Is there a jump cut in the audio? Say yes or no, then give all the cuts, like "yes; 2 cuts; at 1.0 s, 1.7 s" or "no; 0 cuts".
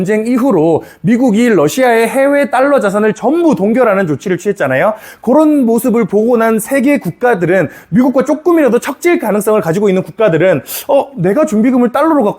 no; 0 cuts